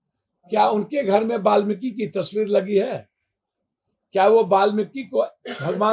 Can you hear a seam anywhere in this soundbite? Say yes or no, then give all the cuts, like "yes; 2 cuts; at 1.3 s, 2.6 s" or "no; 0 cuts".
no; 0 cuts